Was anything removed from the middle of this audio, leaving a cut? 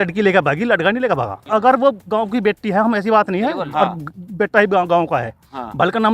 yes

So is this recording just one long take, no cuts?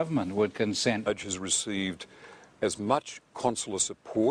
yes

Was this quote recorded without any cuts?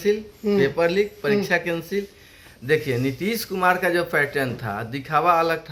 yes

